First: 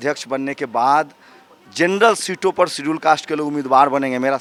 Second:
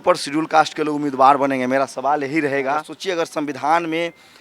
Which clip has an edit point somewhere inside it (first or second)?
second